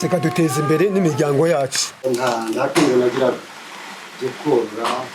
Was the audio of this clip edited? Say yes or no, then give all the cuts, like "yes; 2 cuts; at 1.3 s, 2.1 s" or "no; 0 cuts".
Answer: yes; 1 cut; at 2.0 s